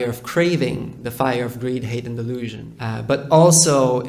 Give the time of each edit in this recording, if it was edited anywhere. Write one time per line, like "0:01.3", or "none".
0:02.6